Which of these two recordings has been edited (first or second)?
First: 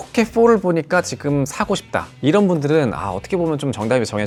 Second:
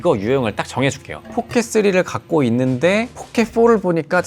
second